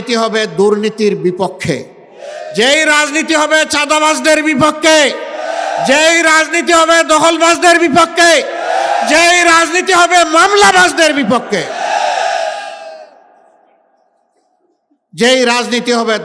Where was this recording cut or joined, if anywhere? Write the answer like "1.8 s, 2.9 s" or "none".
none